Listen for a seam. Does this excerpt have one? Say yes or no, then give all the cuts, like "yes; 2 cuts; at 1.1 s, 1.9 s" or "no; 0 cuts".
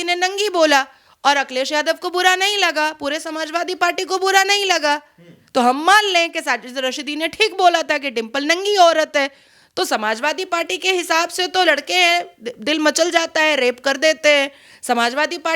no; 0 cuts